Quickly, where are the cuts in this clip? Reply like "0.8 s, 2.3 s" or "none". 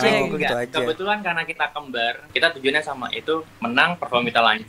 2.2 s